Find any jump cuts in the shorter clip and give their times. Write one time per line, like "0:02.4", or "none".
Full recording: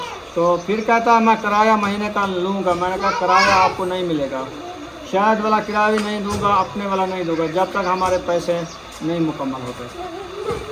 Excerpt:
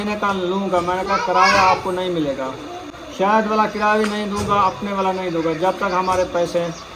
none